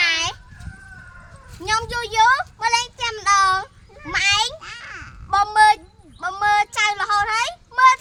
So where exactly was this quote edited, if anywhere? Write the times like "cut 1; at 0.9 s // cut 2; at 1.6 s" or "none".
none